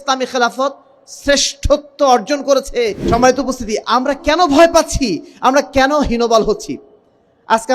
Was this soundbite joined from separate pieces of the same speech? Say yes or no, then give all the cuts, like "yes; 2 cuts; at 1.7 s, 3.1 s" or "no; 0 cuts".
yes; 1 cut; at 3.0 s